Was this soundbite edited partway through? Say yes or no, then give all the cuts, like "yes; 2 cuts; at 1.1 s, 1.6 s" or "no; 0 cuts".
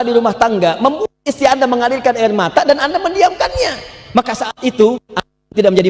no; 0 cuts